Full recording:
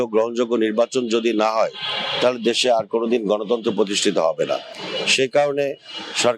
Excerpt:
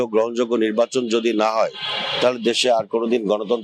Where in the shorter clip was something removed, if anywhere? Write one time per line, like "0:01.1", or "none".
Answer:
none